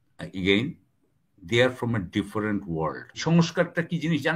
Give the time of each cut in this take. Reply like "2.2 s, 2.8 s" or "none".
3.2 s

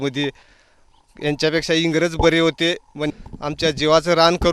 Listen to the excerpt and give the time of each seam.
3.0 s

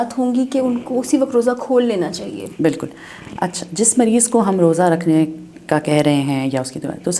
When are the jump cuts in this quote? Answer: none

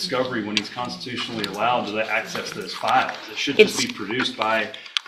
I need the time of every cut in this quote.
none

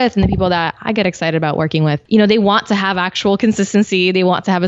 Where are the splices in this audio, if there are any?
2.0 s

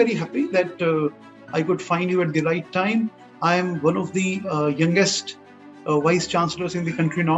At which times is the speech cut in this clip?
none

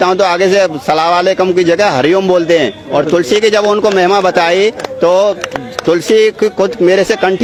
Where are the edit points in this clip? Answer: none

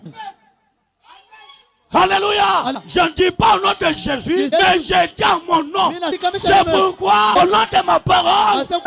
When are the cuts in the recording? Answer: 6.1 s

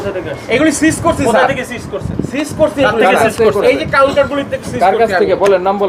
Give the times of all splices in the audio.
none

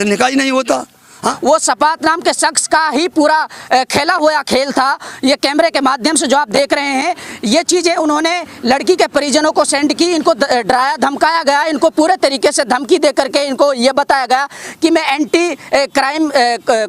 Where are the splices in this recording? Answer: 1.4 s

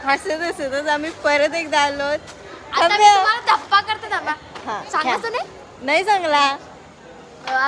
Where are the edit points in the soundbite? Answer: none

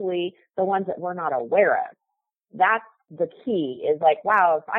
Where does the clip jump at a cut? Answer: 3.0 s

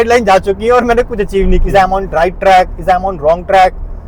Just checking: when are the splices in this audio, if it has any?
1.6 s

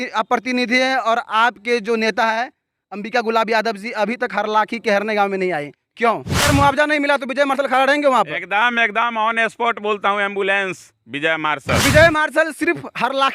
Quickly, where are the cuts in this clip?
6.4 s, 11.8 s

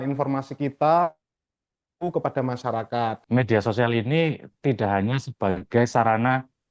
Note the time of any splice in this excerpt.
3.2 s

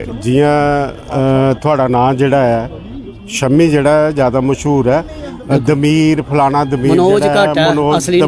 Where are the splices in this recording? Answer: none

